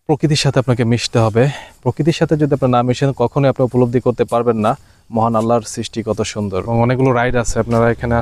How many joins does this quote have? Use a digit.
1